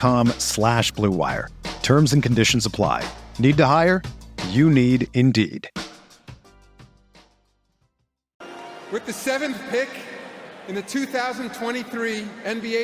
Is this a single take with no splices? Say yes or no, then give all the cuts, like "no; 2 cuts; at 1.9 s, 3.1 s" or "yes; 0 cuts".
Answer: no; 1 cut; at 8.4 s